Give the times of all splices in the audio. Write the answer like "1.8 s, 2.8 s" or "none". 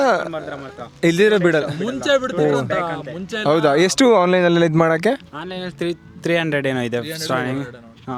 none